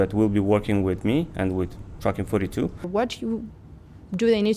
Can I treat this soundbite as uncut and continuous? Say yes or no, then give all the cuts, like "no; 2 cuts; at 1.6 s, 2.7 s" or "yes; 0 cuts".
no; 1 cut; at 2.8 s